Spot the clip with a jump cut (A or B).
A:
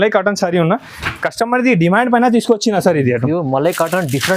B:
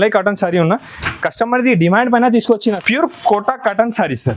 B